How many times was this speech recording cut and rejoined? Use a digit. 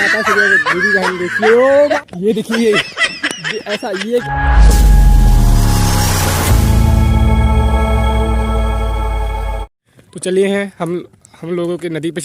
3